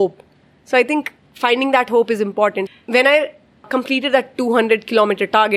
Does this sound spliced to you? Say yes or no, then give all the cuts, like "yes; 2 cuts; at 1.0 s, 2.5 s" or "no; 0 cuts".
yes; 2 cuts; at 2.7 s, 3.7 s